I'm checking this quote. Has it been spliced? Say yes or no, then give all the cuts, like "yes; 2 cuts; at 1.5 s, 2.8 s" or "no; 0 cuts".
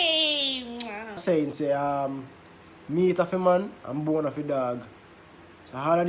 yes; 1 cut; at 1.2 s